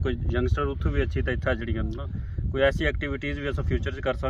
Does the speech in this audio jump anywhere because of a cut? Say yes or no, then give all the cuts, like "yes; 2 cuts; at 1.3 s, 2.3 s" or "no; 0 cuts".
no; 0 cuts